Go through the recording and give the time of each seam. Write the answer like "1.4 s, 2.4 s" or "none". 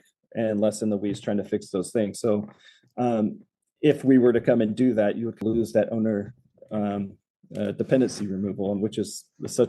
5.4 s

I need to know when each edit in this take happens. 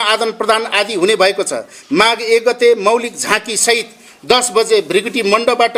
none

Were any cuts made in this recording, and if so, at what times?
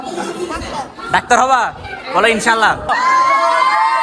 2.9 s

